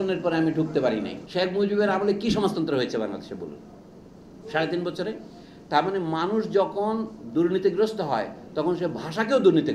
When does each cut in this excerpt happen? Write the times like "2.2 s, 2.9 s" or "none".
1.2 s